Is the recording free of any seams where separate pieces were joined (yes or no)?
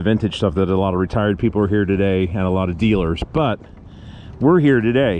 yes